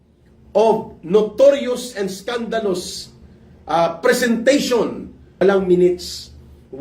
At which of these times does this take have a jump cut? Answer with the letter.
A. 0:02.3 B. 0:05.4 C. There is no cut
B